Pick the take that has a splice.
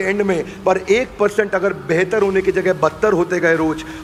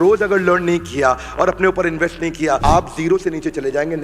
second; 1 cut; at 2.6 s

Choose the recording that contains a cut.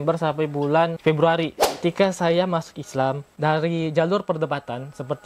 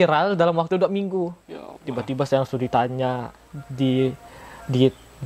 first; 2 cuts; at 1.0 s, 1.8 s

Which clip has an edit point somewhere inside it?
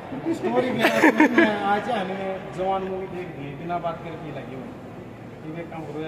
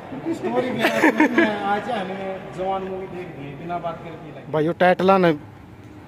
second; 1 cut; at 4.3 s

